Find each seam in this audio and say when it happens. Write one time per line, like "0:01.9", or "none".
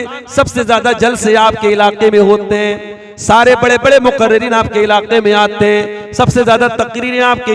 none